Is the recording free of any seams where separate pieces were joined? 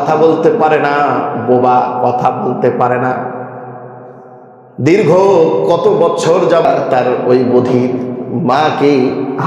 no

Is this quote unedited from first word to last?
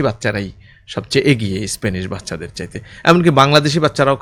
yes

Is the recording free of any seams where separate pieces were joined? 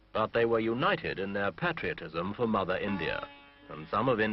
no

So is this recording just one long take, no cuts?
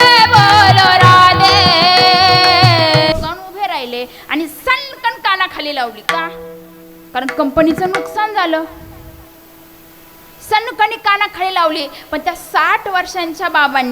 no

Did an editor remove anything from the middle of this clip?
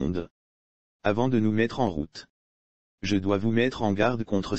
no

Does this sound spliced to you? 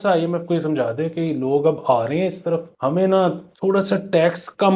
yes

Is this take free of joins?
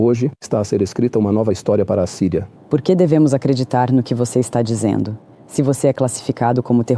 no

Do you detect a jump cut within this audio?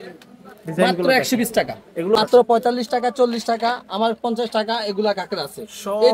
yes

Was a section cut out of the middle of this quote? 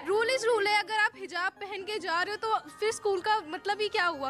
no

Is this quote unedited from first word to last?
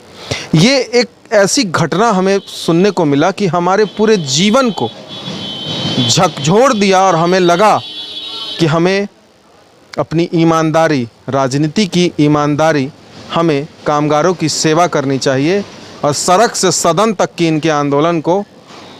yes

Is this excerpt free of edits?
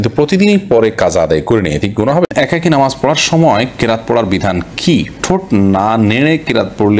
no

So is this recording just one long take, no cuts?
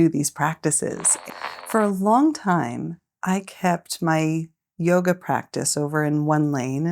no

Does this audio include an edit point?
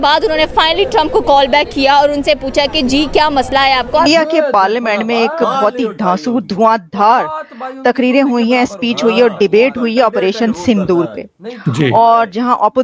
yes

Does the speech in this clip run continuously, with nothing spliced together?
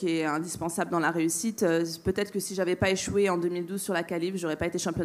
yes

